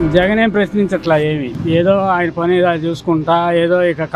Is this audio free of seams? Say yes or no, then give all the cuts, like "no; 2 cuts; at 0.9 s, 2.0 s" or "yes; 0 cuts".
yes; 0 cuts